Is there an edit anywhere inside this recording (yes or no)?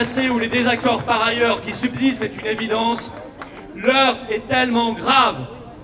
no